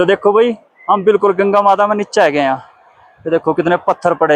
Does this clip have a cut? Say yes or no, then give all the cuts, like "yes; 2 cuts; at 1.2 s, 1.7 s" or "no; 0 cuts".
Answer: no; 0 cuts